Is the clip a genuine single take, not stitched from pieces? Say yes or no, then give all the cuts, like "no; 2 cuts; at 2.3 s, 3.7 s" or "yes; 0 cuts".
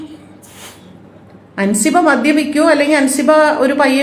yes; 0 cuts